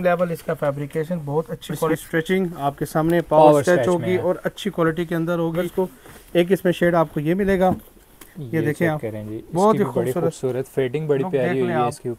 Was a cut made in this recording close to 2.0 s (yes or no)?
yes